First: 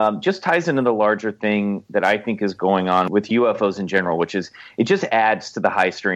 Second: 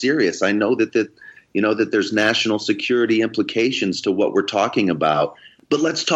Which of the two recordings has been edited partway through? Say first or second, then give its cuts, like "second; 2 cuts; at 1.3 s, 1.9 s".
first; 1 cut; at 3.1 s